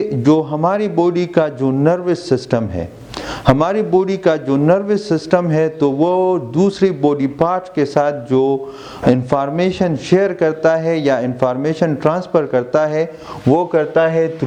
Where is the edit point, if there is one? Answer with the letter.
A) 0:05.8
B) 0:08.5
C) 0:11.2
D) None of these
D